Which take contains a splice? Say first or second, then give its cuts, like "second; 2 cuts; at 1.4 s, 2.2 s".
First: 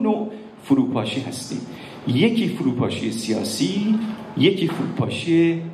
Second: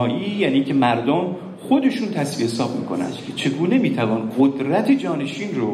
second; 1 cut; at 3.3 s